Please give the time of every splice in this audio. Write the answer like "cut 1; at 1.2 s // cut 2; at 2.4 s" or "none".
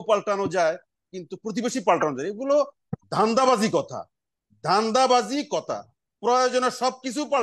none